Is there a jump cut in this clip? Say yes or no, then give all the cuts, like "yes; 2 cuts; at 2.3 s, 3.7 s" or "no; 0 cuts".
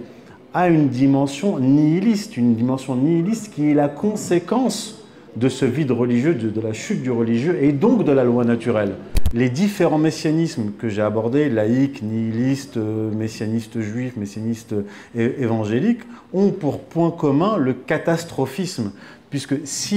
yes; 1 cut; at 9.2 s